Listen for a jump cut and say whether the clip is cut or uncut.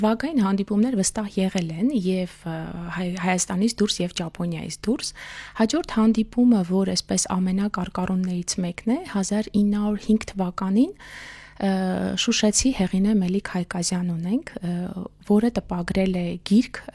uncut